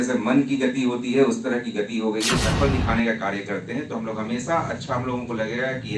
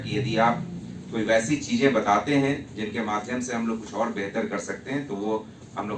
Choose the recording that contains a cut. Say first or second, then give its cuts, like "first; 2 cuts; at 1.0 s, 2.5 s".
first; 1 cut; at 2.4 s